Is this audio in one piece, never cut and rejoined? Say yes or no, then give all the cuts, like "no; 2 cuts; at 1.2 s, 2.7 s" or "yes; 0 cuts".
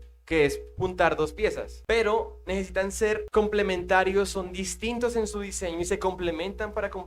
no; 2 cuts; at 1.7 s, 3.2 s